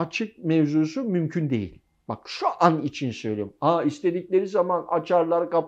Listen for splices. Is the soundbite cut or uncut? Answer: uncut